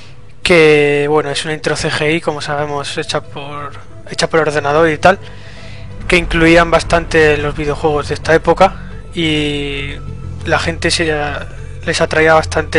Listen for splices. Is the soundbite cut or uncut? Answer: cut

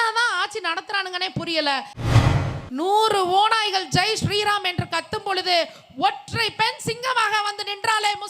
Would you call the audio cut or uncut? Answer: cut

